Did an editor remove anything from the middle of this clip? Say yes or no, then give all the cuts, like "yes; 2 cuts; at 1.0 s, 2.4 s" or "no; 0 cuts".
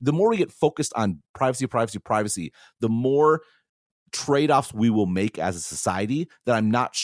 yes; 1 cut; at 1.3 s